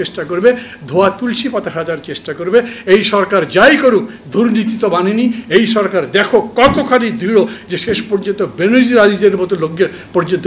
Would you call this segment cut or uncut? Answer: uncut